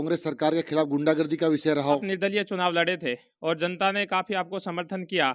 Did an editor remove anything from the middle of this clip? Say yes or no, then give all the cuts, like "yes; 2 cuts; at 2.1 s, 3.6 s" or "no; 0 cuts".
yes; 1 cut; at 2.0 s